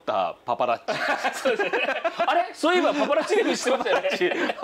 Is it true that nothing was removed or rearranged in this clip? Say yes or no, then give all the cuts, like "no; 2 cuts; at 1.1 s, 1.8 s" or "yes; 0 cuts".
yes; 0 cuts